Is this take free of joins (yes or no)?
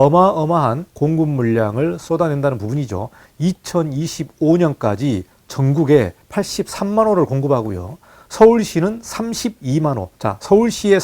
no